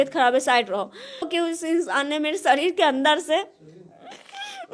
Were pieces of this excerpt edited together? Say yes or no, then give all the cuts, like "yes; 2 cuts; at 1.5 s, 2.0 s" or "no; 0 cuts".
yes; 1 cut; at 1.3 s